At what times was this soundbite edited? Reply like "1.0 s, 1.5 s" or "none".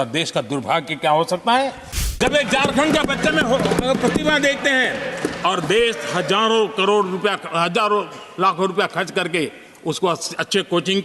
2.2 s

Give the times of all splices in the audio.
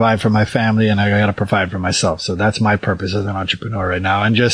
none

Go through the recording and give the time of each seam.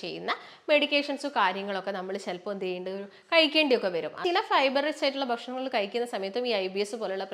4.2 s

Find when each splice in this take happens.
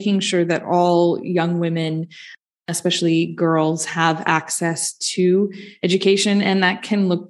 none

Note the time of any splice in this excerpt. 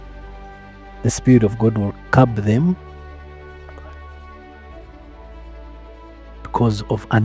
none

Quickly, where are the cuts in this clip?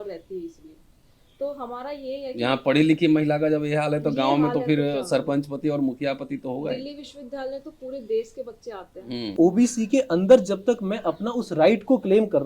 9.3 s

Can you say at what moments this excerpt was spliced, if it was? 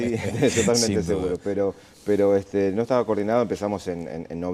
1.9 s

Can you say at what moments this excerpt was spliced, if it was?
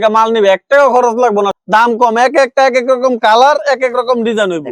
1.5 s

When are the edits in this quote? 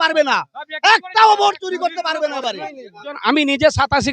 3.2 s

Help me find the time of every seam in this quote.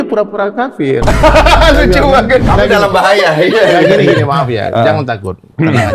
2.5 s

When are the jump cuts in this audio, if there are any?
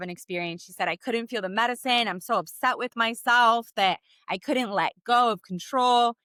none

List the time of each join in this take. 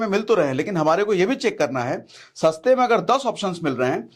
none

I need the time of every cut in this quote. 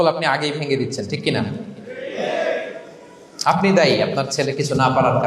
none

